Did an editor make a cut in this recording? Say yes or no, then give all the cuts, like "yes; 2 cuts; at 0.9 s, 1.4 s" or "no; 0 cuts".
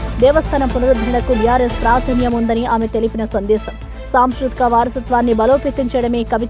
no; 0 cuts